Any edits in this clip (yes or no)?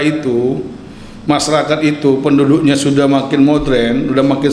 no